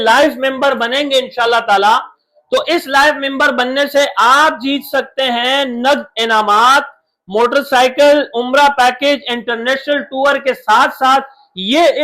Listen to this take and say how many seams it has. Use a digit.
0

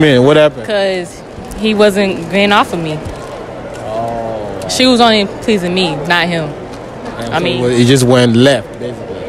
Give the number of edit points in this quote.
0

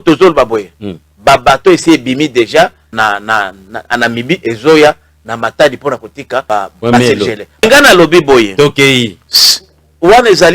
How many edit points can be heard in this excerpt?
3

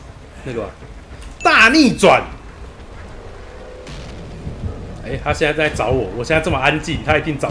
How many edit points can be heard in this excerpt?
1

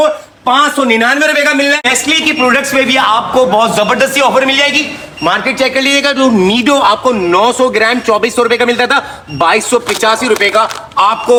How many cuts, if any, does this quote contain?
0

